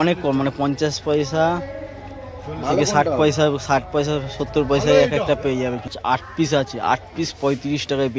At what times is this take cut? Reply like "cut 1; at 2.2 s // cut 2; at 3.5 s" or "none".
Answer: cut 1; at 6.0 s